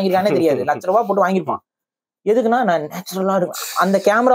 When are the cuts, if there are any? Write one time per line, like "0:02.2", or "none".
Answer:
none